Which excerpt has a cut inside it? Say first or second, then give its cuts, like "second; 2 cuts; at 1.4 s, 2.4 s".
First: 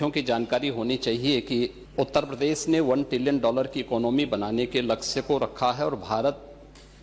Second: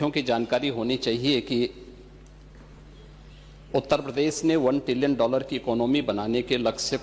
first; 1 cut; at 1.8 s